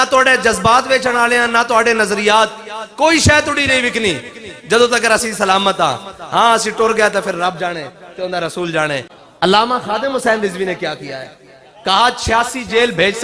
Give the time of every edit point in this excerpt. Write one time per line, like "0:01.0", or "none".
0:09.2